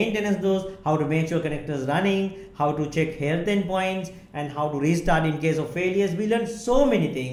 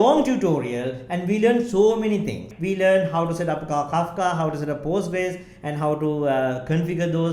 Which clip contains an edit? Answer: second; 1 cut; at 2.5 s

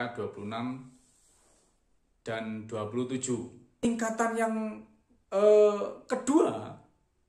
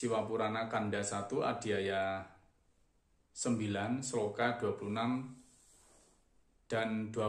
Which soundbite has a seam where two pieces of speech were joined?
first; 1 cut; at 3.8 s

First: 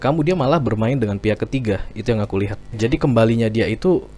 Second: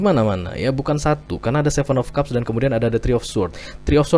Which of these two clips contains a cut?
first; 1 cut; at 2.8 s

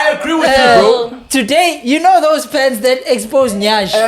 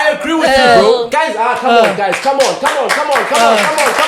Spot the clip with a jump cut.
second; 1 cut; at 1.1 s

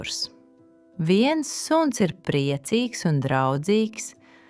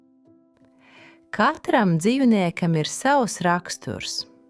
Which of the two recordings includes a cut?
second; 1 cut; at 1.3 s

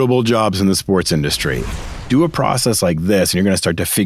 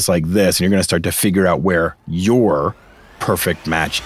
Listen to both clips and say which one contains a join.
first; 1 cut; at 1.7 s

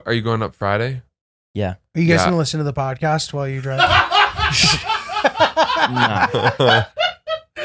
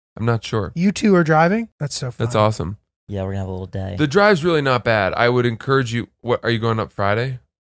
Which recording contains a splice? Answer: second; 1 cut; at 1.8 s

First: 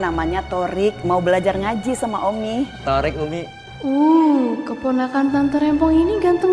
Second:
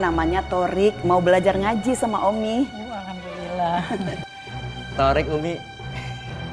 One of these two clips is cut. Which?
first; 2 cuts; at 2.8 s, 3.6 s

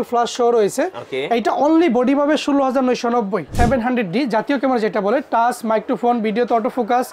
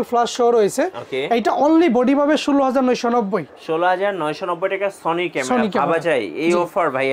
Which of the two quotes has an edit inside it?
first; 1 cut; at 3.5 s

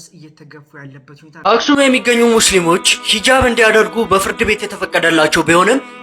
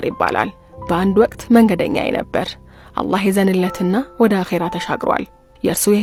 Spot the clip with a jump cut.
first; 1 cut; at 1.4 s

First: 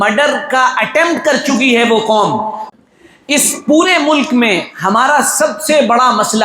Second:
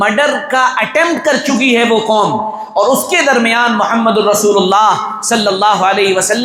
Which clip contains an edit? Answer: first; 1 cut; at 2.6 s

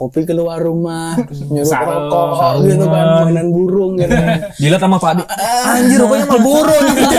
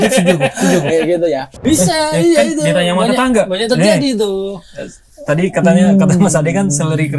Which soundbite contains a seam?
second; 1 cut; at 1.5 s

